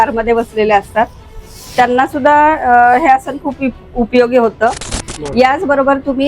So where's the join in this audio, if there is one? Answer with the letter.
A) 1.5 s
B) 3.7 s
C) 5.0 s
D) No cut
C